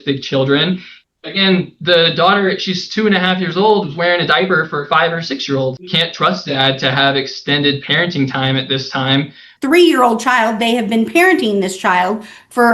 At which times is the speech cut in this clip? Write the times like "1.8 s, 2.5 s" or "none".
0.9 s, 5.8 s, 9.5 s